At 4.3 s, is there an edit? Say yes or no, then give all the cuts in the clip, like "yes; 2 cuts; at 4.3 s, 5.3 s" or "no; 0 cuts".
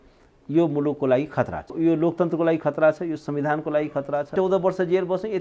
yes; 2 cuts; at 1.7 s, 4.3 s